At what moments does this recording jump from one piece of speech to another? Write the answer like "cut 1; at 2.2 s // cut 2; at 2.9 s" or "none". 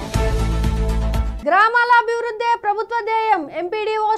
cut 1; at 1.3 s